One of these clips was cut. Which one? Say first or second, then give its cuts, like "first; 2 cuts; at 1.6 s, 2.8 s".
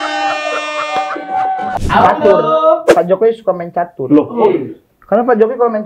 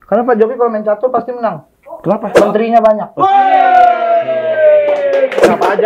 first; 1 cut; at 1.8 s